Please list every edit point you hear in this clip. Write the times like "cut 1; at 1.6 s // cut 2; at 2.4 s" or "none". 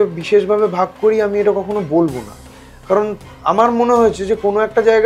none